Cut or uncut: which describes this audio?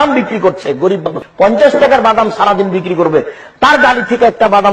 cut